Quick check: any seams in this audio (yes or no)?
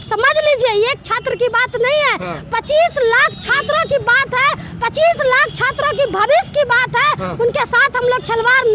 no